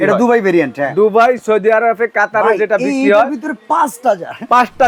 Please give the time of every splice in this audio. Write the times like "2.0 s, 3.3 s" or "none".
none